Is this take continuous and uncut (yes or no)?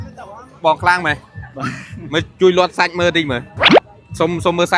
yes